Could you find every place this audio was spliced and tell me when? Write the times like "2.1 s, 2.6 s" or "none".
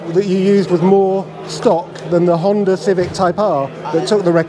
none

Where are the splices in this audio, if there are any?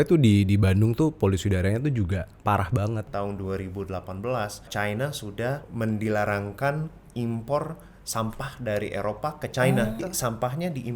3.1 s, 4.7 s, 5.7 s, 10.0 s

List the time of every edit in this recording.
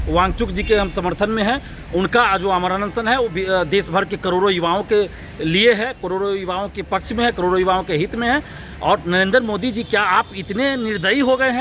none

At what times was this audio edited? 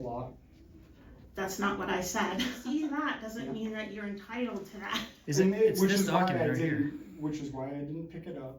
2.6 s

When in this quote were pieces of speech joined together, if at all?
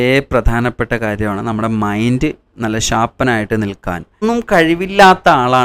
4.2 s

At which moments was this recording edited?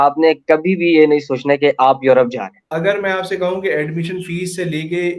2.6 s

